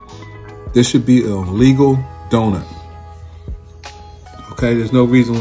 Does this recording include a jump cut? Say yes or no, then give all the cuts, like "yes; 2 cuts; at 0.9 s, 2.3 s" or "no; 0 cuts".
yes; 2 cuts; at 2.7 s, 4.5 s